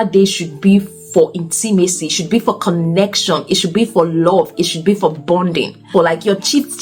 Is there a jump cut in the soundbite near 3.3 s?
no; 1 cut; at 5.9 s

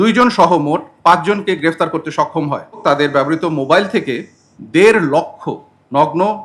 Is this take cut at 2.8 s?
yes; 1 cut; at 2.8 s

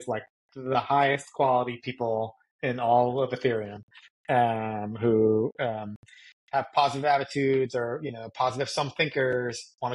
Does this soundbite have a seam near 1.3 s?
no; 0 cuts

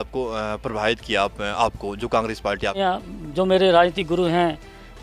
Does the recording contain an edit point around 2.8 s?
yes; 1 cut; at 2.8 s

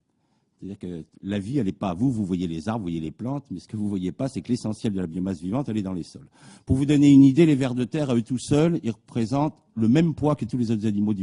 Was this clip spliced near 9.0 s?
yes; 1 cut; at 9.0 s

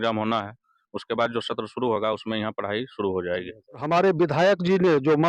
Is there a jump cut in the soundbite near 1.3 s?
no; 1 cut; at 3.8 s

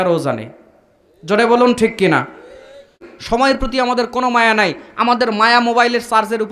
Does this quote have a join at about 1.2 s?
no; 1 cut; at 3.1 s

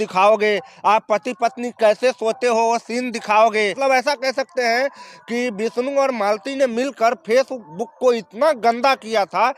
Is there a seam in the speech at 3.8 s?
yes; 1 cut; at 3.8 s

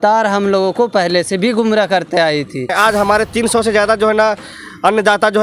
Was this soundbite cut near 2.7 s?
yes; 1 cut; at 2.7 s

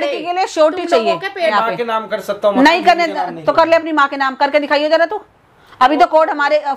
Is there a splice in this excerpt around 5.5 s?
no; 1 cut; at 1.5 s

